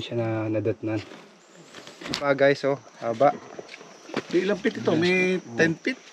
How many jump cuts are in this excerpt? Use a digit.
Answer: 1